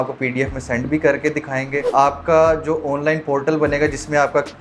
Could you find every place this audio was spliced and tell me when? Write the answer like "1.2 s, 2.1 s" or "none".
1.9 s